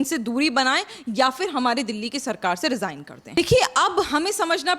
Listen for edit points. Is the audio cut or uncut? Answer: cut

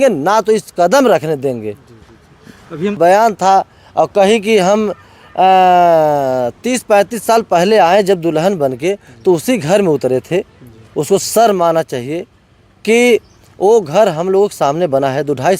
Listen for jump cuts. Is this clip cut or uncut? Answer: cut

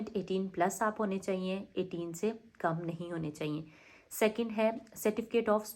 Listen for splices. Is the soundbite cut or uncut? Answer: uncut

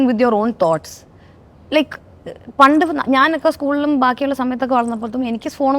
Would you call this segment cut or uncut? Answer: uncut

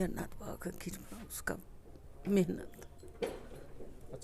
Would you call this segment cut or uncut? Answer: uncut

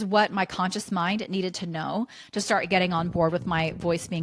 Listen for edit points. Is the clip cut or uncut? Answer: uncut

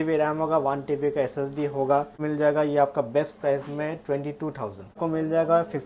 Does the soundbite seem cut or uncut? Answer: cut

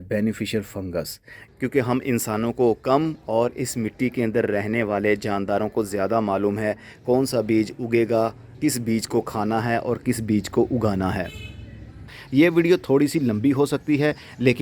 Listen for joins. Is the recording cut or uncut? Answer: cut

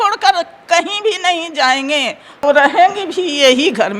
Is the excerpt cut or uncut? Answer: cut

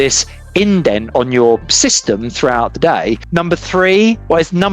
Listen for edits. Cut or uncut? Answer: cut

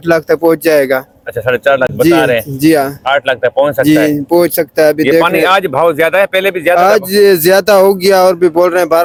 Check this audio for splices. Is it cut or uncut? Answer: uncut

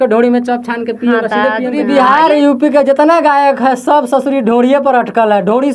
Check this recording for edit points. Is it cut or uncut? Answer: cut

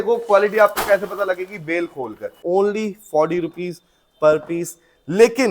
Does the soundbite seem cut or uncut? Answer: cut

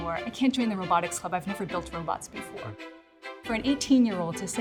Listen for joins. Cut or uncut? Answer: uncut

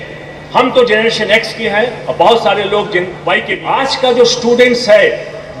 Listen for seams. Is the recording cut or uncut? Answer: cut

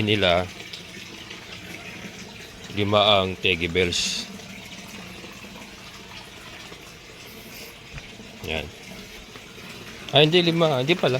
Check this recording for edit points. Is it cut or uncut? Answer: uncut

